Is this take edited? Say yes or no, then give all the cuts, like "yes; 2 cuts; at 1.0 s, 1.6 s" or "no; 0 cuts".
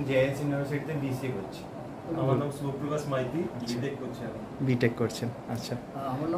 yes; 2 cuts; at 2.1 s, 3.6 s